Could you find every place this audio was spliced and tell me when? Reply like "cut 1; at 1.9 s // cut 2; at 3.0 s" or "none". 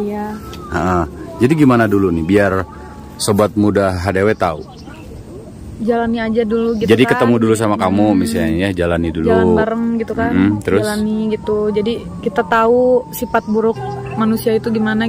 none